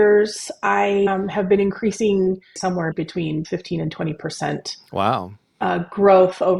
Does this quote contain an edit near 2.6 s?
yes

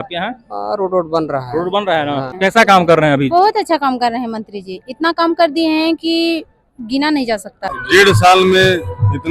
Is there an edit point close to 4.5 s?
no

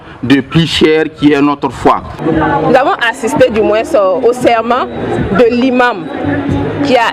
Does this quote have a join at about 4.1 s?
no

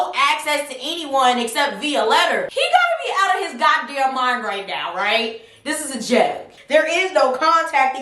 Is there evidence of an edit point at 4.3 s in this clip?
no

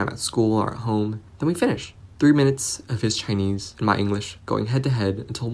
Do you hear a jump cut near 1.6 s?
yes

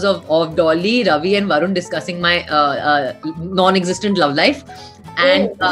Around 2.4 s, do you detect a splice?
no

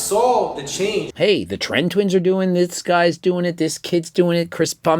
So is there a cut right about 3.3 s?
no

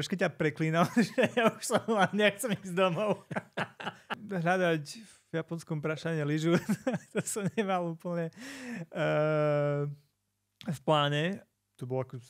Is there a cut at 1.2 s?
no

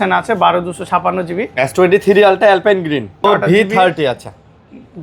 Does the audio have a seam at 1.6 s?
no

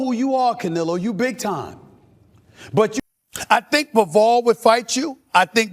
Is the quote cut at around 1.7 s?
no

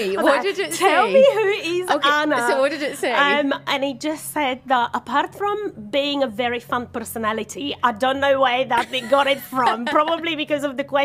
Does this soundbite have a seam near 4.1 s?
no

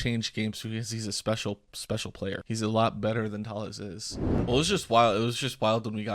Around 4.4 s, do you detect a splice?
yes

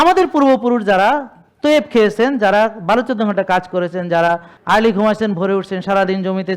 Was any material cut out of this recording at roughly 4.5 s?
yes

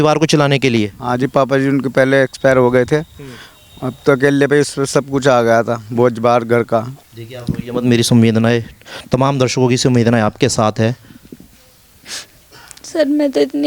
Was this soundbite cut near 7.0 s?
yes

